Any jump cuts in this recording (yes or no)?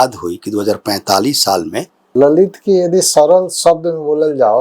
yes